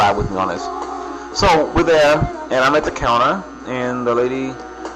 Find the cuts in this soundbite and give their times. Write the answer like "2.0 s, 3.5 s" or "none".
none